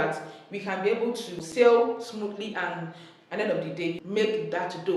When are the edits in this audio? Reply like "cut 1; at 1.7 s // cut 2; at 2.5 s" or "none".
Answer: cut 1; at 1.4 s // cut 2; at 4.0 s

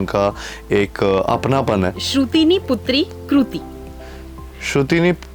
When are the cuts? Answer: cut 1; at 2.0 s

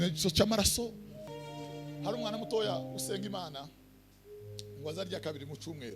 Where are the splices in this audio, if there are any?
cut 1; at 1.2 s

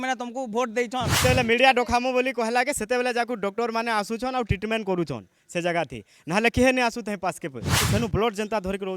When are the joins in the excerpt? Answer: cut 1; at 1.1 s // cut 2; at 7.9 s

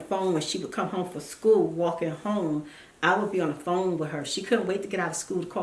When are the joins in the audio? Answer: none

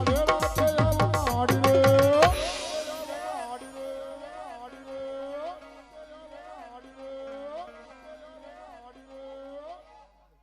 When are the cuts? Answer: cut 1; at 4.1 s

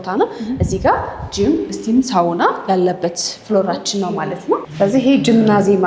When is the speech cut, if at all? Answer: cut 1; at 4.7 s

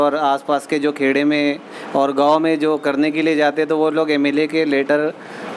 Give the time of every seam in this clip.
none

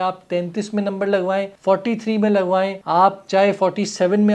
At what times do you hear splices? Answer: cut 1; at 1.5 s // cut 2; at 2.8 s

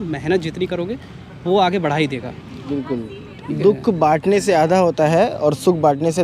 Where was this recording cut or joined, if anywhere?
cut 1; at 2.6 s

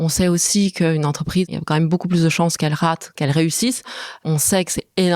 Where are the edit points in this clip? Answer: cut 1; at 1.5 s // cut 2; at 3.1 s // cut 3; at 4.2 s

